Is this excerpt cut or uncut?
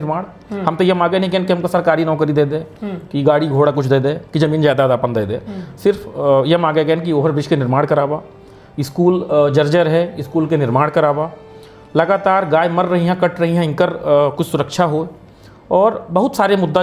uncut